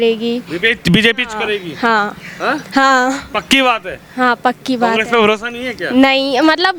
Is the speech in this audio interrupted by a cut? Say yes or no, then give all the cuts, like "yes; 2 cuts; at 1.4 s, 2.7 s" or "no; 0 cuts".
no; 0 cuts